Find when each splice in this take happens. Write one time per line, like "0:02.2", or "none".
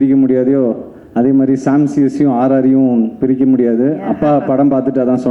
none